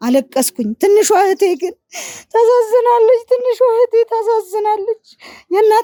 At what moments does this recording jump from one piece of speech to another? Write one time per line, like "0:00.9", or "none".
none